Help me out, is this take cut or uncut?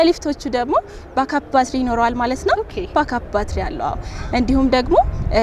uncut